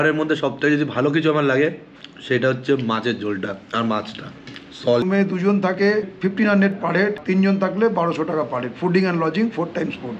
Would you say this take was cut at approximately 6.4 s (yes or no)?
no